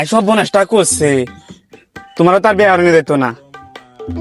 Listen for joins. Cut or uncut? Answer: uncut